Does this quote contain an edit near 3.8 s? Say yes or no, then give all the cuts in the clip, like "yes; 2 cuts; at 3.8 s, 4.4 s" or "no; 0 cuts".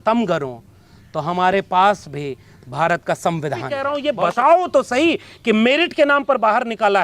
yes; 1 cut; at 3.8 s